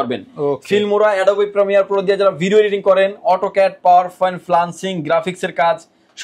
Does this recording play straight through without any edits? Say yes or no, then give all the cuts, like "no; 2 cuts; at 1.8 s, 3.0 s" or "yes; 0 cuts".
yes; 0 cuts